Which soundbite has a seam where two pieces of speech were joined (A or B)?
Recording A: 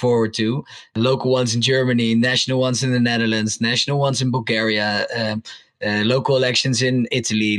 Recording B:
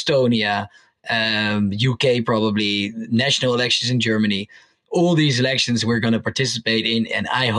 A